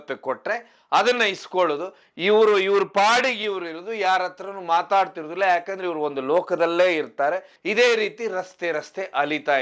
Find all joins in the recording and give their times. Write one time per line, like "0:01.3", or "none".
0:07.5